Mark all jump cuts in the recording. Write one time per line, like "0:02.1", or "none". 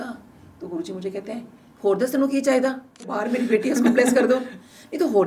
0:03.1

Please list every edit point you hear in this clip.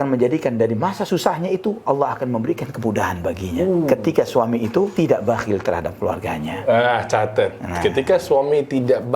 0:01.0
0:04.9

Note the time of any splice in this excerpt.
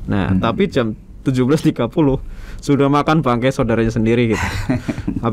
none

